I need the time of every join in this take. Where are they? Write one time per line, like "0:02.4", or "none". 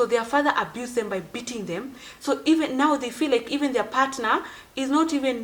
none